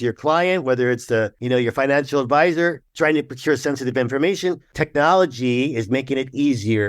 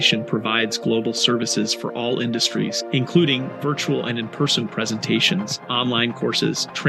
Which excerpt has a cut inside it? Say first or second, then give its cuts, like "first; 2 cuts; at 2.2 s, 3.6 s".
first; 3 cuts; at 1.4 s, 2.8 s, 4.7 s